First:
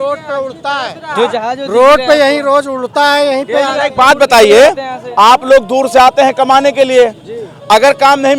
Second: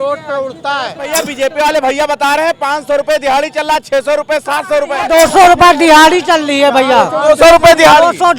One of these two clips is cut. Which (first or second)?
second